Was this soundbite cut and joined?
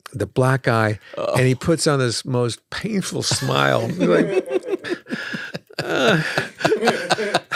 no; 0 cuts

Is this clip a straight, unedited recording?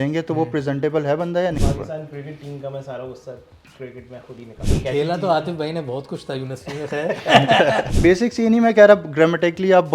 no; 3 cuts; at 1.5 s, 4.6 s, 7.9 s

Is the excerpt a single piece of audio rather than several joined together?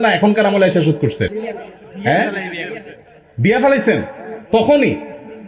yes; 0 cuts

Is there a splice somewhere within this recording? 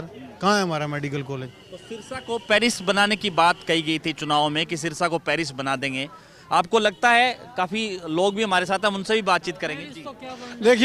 no; 0 cuts

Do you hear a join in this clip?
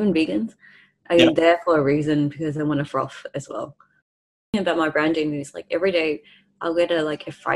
yes; 1 cut; at 4.5 s

